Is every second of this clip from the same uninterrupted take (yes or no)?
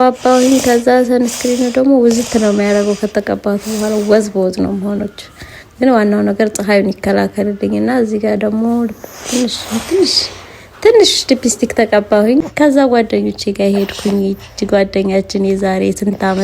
no